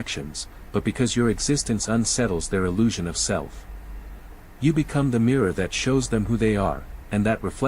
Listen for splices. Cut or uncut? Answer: uncut